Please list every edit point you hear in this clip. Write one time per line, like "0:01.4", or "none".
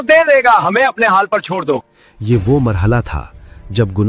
0:01.9